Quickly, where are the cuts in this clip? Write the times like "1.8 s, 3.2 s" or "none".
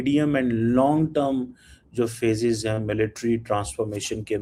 none